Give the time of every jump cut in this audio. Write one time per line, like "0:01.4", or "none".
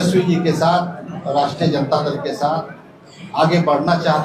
none